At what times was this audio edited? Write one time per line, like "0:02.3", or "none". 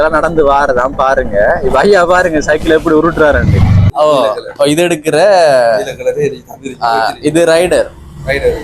0:03.8